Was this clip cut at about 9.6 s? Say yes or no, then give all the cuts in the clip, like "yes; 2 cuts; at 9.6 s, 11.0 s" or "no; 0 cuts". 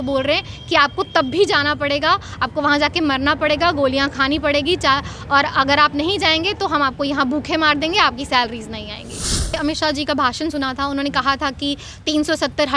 yes; 1 cut; at 9.6 s